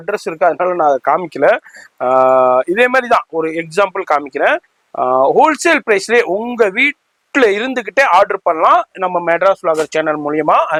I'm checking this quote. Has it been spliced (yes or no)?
no